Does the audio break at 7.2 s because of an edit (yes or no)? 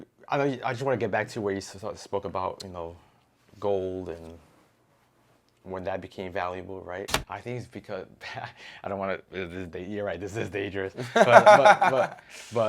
yes